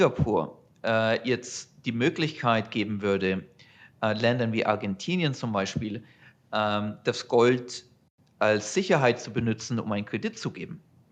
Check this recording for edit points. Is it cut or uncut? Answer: uncut